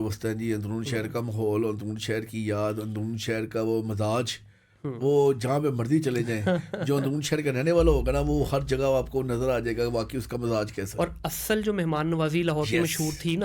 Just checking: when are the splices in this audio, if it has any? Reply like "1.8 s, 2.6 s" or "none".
none